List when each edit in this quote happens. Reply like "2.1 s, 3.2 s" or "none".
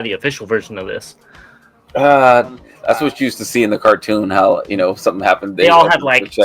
2.7 s